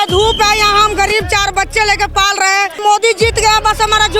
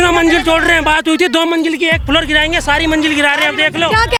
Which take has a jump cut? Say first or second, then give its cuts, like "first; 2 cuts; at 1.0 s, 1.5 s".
first; 1 cut; at 2.8 s